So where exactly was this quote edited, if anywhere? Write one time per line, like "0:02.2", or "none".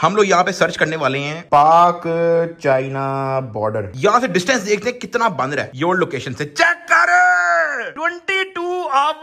none